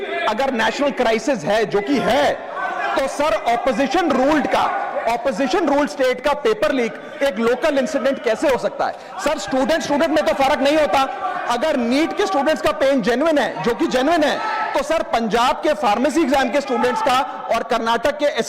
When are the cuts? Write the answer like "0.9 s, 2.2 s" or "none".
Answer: none